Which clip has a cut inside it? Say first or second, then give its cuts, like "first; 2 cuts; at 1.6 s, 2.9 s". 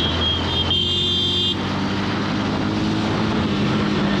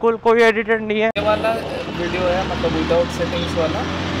second; 1 cut; at 1.2 s